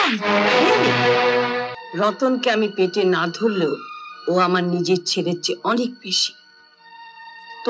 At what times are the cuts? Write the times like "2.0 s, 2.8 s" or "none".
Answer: 1.8 s